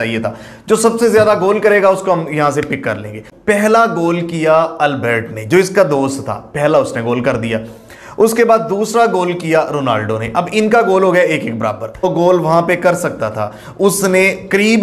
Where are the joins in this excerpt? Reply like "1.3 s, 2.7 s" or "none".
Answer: 3.3 s, 12.1 s